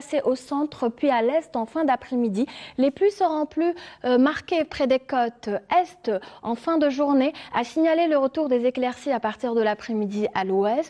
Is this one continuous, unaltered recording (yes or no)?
no